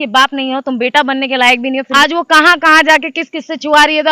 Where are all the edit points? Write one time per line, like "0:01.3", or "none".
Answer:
0:01.9